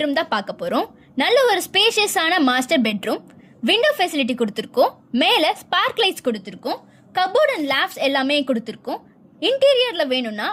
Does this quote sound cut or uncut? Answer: uncut